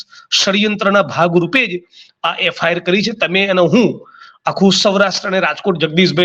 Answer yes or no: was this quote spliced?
no